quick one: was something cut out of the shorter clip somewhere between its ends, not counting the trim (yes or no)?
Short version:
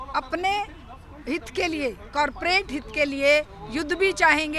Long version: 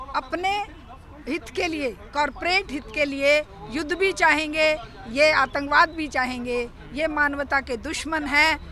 no